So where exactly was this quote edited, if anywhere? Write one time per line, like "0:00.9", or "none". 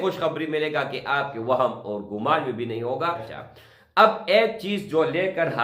0:03.3